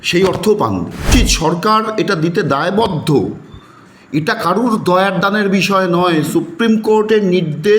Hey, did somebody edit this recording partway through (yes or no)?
yes